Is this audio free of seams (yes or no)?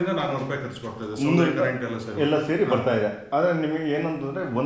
yes